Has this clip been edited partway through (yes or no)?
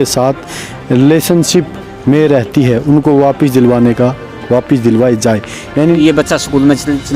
yes